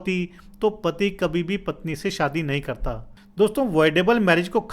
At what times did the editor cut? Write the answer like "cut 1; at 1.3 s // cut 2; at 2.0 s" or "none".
cut 1; at 3.1 s